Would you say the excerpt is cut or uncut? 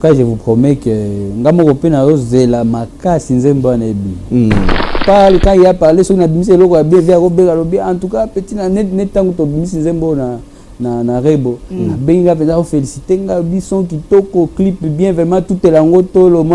cut